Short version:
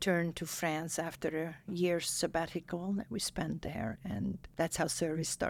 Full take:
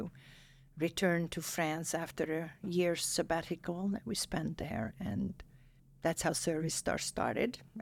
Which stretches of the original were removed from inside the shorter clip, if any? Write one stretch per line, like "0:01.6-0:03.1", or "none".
0:05.4-0:05.9